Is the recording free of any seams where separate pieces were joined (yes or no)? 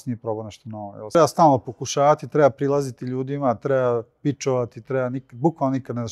no